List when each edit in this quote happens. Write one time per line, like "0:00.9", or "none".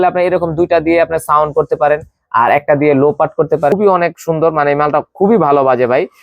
0:03.7